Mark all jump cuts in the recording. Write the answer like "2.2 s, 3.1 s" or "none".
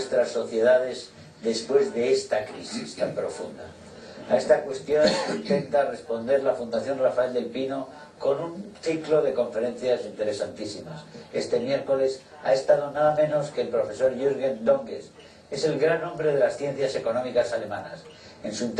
none